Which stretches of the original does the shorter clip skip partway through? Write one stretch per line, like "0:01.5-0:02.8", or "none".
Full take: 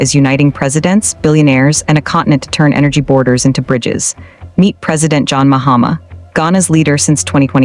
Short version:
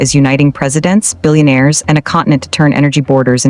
none